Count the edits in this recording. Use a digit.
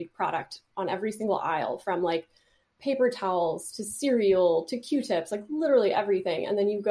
0